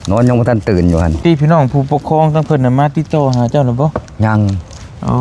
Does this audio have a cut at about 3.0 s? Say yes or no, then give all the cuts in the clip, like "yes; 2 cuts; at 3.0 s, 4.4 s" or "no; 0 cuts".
no; 1 cut; at 1.1 s